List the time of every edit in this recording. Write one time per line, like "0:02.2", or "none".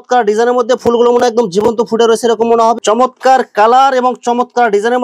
0:02.8

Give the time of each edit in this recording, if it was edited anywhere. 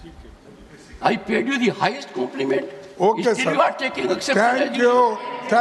none

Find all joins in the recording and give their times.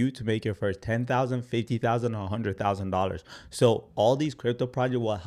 none

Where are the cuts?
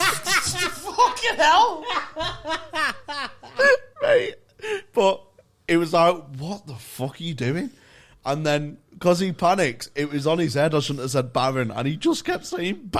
none

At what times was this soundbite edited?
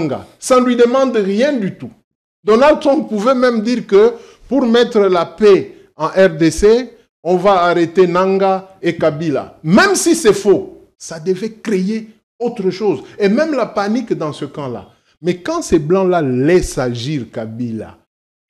none

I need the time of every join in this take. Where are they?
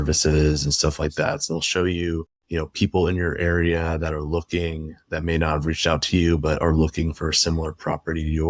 0:01.4

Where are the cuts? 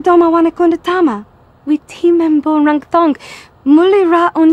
0:01.6

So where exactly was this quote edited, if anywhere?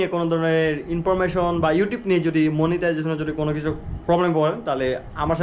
none

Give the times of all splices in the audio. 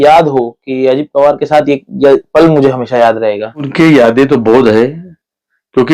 0:03.7

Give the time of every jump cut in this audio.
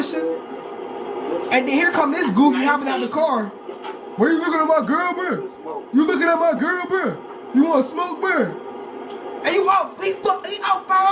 none

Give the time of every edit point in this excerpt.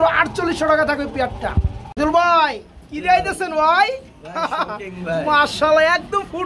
none

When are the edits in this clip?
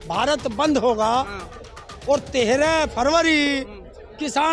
none

